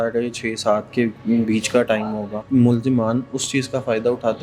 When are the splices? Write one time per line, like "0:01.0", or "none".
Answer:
0:02.4